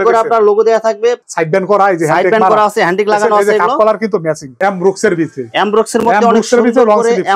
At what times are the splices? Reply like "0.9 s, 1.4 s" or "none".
1.2 s, 4.5 s